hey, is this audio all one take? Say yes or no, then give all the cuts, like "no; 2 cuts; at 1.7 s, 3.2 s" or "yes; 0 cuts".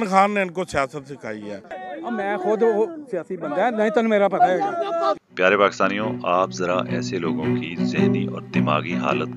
no; 2 cuts; at 1.8 s, 5.2 s